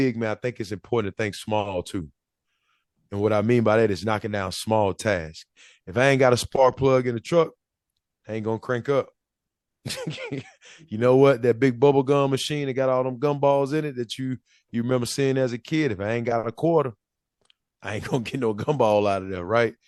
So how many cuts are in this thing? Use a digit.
0